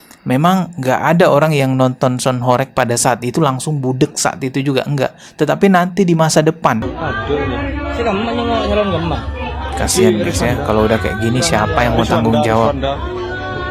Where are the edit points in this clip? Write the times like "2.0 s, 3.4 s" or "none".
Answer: 6.9 s